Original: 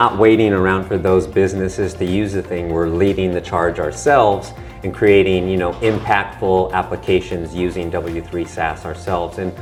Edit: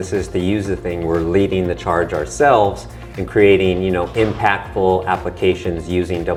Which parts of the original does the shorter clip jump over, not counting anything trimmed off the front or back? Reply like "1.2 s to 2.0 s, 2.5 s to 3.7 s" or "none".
none